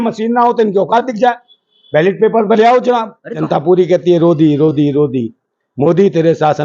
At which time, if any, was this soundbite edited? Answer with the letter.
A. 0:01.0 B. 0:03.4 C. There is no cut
B